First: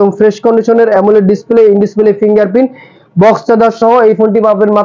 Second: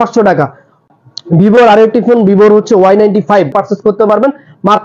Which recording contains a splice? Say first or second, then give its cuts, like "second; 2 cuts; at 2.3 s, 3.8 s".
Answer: second; 1 cut; at 3.5 s